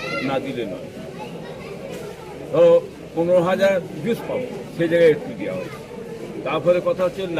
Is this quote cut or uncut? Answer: uncut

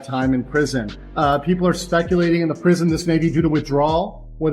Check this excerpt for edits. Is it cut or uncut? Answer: cut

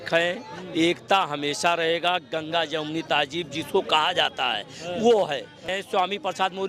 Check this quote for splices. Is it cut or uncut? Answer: cut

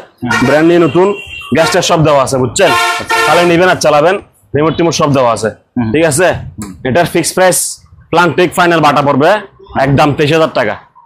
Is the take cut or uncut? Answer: uncut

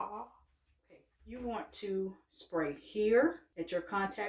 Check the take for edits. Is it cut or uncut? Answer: cut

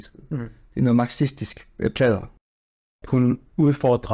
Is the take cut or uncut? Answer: cut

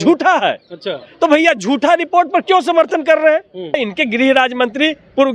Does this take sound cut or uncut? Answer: cut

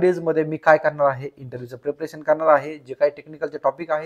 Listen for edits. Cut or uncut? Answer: uncut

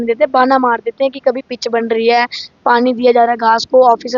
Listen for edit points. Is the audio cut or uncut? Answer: uncut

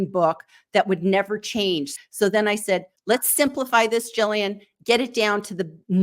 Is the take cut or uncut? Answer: cut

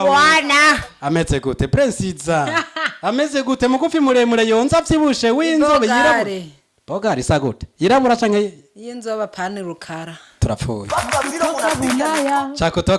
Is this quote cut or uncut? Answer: uncut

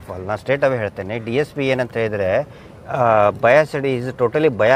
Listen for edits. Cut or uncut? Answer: uncut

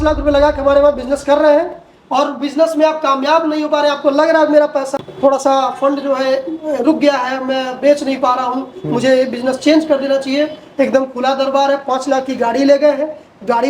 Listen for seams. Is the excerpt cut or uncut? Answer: uncut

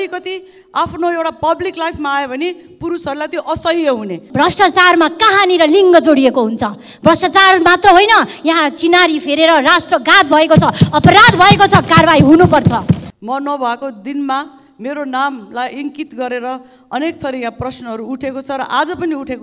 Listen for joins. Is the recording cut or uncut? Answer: cut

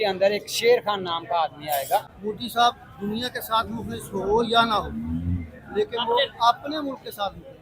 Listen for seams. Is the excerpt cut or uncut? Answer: cut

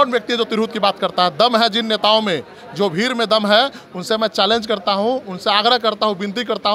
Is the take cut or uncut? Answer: uncut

